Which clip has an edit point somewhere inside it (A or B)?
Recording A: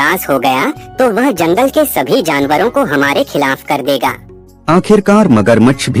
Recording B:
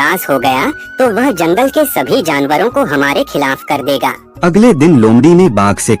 B